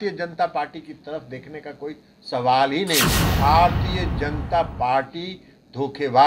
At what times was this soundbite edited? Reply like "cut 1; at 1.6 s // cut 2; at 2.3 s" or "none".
cut 1; at 3.2 s